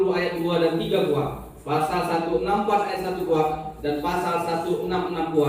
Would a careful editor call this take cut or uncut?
uncut